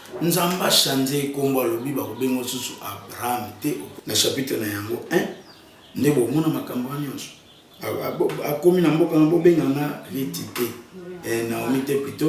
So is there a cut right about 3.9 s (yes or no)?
yes